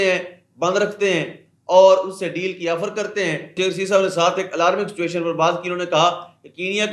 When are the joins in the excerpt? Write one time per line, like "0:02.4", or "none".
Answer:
0:03.5

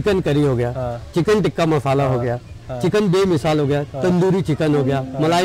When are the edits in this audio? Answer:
none

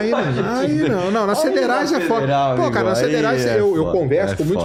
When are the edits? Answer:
none

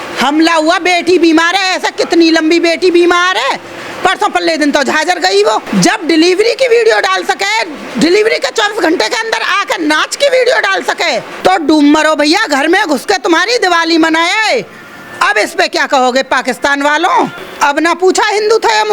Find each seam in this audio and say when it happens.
0:05.6
0:11.3
0:17.4

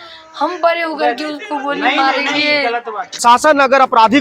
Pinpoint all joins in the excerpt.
0:03.1

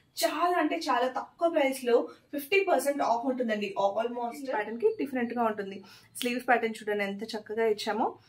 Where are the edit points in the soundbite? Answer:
0:04.4

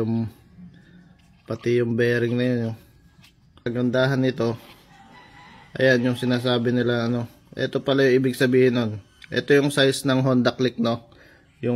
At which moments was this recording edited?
0:03.6

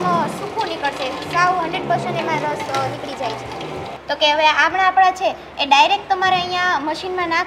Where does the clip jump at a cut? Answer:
0:03.9

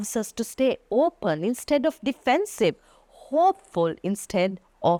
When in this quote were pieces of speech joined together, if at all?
none

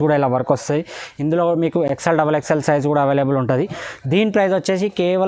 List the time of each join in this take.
none

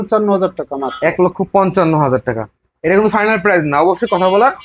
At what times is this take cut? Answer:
none

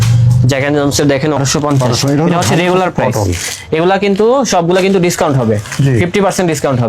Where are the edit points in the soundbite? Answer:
0:01.4

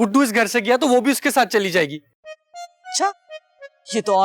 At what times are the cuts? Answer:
none

